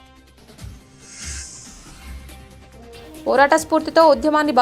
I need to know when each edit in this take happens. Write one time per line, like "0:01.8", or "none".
0:01.5